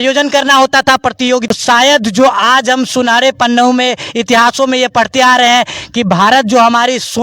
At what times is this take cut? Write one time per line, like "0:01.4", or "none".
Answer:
0:01.5

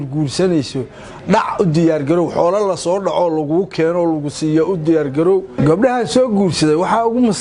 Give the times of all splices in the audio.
0:05.5

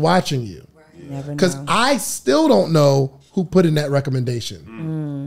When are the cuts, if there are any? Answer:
none

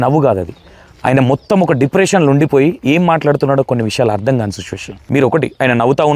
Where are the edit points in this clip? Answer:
0:04.9

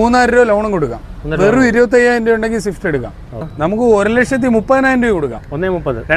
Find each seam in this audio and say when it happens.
0:03.5

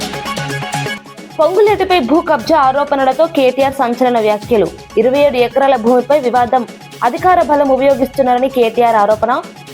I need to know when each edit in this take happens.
0:01.0

